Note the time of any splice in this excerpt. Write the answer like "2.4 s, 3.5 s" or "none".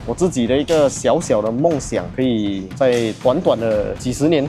2.1 s